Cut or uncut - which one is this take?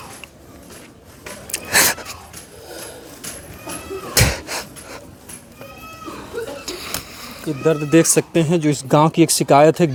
uncut